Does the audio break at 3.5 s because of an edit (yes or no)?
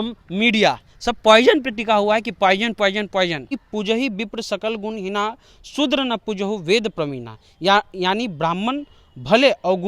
yes